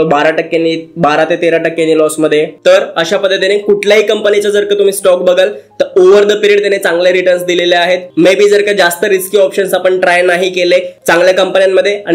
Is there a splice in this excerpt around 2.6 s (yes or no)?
no